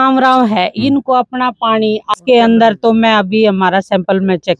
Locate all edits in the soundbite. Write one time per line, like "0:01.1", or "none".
0:02.1